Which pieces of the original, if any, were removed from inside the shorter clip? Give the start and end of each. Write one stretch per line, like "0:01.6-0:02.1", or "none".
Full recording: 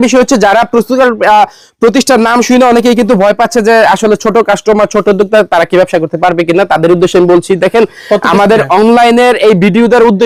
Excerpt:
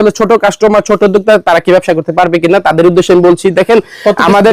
none